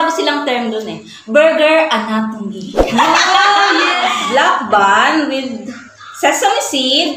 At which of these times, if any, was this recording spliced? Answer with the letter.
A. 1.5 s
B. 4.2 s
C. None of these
B